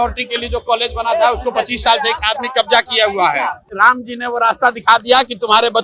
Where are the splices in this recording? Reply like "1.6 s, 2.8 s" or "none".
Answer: 3.7 s